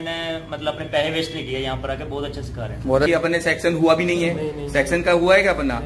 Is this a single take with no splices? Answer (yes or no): no